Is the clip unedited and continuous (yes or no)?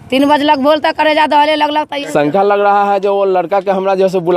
no